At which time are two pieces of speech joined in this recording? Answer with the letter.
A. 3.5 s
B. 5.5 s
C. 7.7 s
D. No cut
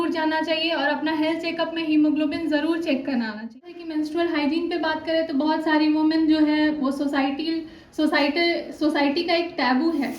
A